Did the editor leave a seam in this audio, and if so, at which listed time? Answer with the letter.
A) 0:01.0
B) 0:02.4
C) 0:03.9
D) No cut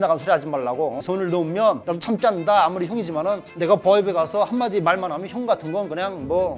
A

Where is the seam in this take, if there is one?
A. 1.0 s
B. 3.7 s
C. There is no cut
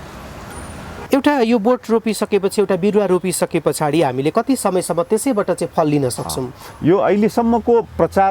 A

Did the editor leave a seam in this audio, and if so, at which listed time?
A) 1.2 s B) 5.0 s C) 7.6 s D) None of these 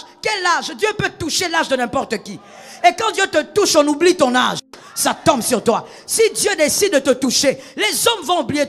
D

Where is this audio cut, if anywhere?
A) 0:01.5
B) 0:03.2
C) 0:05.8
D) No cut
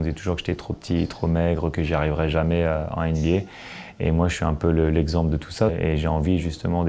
C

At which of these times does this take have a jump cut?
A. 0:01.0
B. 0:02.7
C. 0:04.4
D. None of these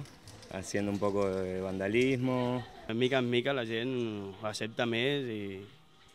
B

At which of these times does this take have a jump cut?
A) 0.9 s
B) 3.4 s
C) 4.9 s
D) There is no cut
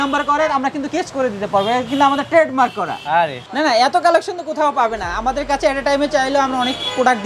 B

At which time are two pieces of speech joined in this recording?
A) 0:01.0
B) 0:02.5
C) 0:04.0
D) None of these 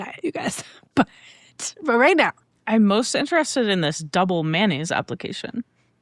B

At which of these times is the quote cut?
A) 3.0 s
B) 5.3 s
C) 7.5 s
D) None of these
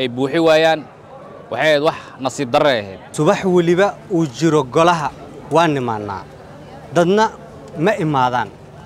A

